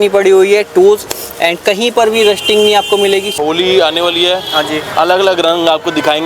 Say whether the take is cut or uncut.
cut